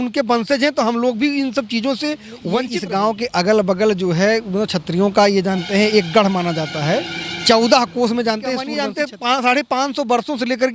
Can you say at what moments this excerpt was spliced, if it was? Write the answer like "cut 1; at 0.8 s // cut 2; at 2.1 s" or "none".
cut 1; at 2.6 s // cut 2; at 8.7 s